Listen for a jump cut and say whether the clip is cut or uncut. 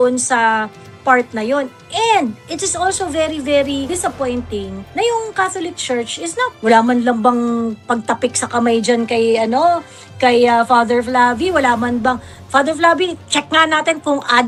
uncut